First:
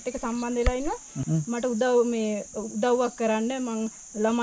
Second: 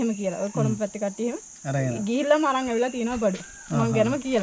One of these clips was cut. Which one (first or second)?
first